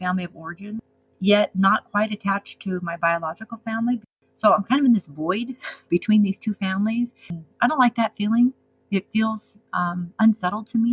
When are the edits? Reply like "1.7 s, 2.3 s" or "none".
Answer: 1.0 s, 4.1 s, 7.4 s